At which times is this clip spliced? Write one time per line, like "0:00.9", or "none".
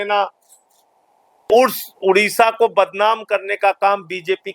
0:01.5